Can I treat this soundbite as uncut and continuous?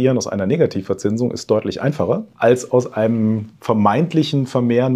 no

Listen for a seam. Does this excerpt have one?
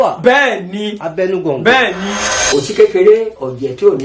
yes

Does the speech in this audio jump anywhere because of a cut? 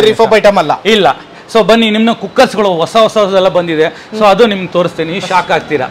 no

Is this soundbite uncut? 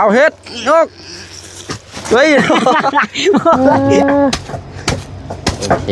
no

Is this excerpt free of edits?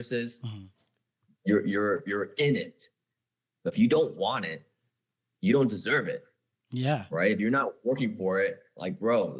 yes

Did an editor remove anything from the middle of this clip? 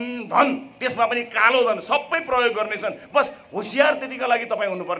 no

